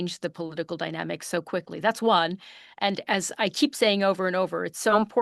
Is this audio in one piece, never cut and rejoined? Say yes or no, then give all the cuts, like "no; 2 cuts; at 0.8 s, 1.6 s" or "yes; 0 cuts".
yes; 0 cuts